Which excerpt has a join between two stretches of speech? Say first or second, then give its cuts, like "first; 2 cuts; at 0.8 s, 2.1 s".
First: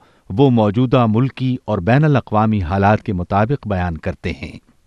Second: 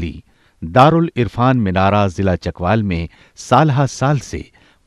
second; 1 cut; at 3.9 s